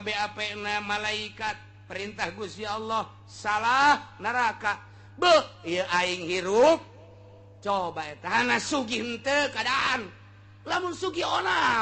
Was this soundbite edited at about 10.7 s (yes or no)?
no